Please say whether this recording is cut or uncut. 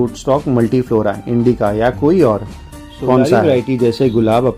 cut